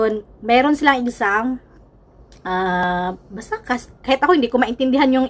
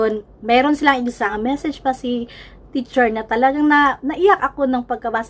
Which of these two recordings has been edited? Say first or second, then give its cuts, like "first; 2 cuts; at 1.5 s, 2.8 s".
second; 1 cut; at 1.3 s